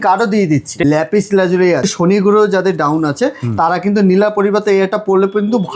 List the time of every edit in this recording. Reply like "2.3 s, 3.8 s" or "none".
0.8 s, 1.9 s